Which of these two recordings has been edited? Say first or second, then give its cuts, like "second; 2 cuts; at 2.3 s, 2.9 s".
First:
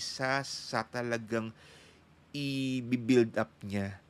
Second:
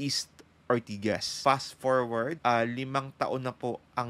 second; 2 cuts; at 1.3 s, 2.4 s